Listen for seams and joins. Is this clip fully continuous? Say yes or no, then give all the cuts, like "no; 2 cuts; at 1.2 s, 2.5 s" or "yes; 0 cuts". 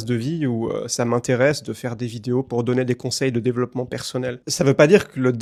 yes; 0 cuts